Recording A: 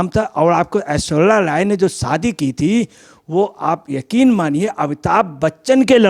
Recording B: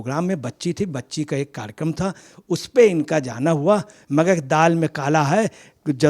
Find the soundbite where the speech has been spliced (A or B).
B